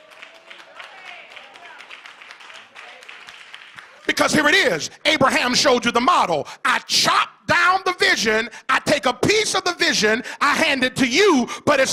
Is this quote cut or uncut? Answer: uncut